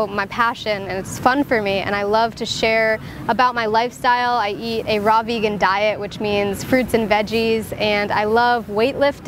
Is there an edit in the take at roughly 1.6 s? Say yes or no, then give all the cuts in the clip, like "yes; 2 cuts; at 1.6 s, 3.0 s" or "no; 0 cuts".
no; 1 cut; at 3.2 s